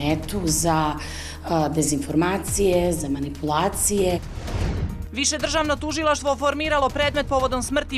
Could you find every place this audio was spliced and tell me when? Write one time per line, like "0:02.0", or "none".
0:04.4